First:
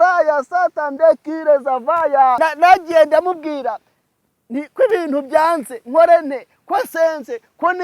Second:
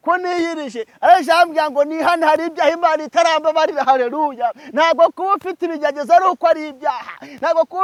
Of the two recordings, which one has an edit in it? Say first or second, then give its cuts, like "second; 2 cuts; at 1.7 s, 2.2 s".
first; 1 cut; at 2.4 s